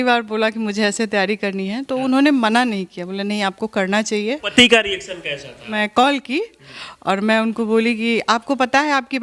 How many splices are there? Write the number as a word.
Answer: two